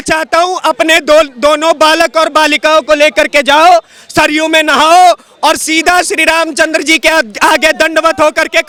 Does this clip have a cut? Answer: no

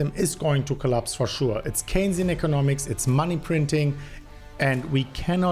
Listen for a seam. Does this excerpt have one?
no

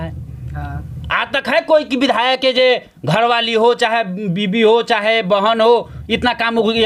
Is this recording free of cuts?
yes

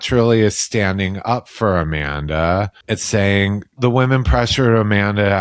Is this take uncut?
no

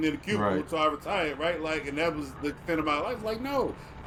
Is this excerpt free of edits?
yes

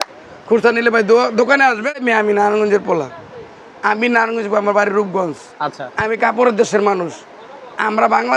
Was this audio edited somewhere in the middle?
yes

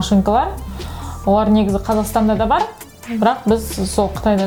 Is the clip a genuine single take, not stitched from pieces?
yes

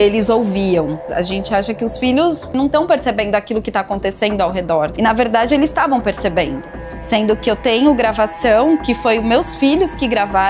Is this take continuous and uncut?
no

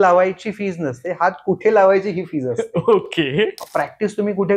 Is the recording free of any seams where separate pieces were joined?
no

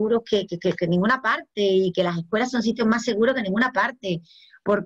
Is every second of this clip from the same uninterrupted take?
yes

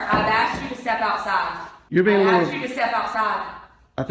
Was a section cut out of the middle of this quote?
yes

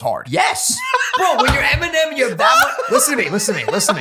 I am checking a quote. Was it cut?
no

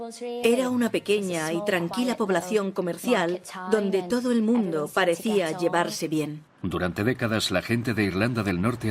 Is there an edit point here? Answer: no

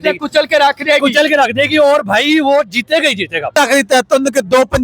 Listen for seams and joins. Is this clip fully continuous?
no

